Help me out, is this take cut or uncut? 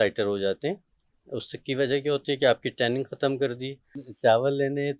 cut